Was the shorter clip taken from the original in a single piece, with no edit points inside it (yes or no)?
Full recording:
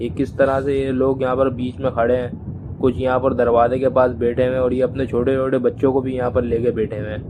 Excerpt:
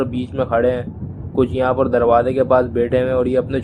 yes